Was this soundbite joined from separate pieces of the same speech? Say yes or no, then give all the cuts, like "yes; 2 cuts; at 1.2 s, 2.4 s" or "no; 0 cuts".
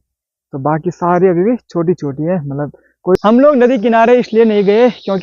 yes; 1 cut; at 3.1 s